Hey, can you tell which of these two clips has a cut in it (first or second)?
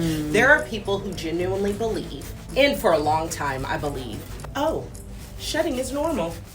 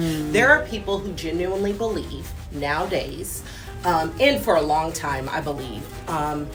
first